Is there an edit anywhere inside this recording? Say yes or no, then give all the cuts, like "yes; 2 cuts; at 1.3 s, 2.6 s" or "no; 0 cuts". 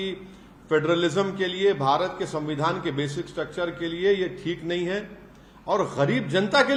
no; 0 cuts